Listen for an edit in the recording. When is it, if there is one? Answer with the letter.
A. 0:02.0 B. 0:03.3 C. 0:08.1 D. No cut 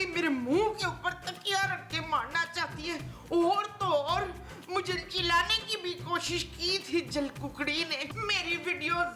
C